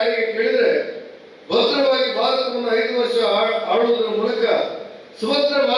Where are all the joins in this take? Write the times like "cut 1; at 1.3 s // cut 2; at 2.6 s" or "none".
none